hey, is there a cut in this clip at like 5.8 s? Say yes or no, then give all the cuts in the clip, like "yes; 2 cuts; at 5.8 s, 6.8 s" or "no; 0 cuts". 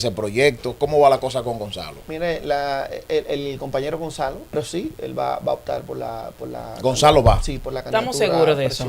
no; 1 cut; at 4.5 s